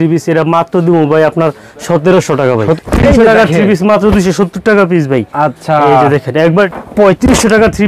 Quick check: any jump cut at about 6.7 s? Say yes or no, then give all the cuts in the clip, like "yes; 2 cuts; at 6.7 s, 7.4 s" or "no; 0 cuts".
yes; 2 cuts; at 2.8 s, 6.7 s